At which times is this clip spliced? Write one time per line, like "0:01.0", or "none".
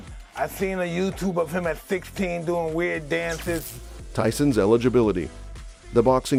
none